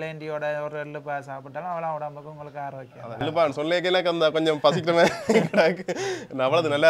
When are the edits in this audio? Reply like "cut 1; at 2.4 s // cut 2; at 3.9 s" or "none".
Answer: cut 1; at 3.2 s